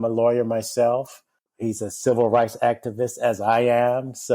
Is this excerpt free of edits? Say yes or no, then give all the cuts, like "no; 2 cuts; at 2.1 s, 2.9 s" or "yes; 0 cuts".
no; 1 cut; at 1.5 s